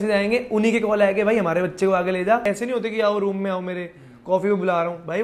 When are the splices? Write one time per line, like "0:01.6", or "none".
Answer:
0:02.4